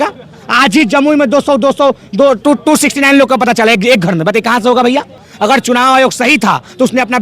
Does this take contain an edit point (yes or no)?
yes